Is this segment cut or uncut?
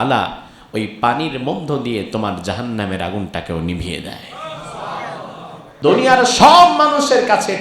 cut